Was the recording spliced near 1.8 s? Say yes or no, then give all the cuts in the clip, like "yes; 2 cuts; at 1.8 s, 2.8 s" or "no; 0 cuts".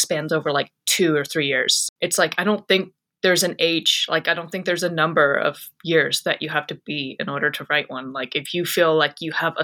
yes; 1 cut; at 1.8 s